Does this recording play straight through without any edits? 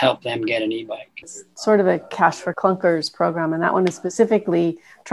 no; 2 cuts; at 1.4 s, 2.5 s

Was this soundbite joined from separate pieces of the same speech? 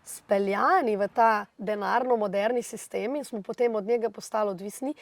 yes; 1 cut; at 1.5 s

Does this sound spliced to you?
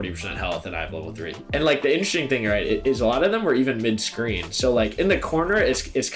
yes; 1 cut; at 1.4 s

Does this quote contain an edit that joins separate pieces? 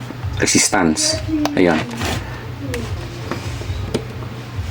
yes; 1 cut; at 3.0 s

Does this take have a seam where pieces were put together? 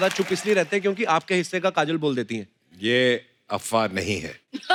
no; 0 cuts

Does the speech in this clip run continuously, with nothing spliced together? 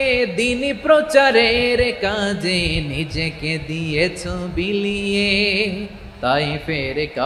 yes; 0 cuts

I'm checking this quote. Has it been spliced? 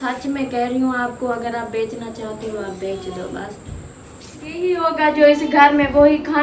yes; 1 cut; at 4.6 s

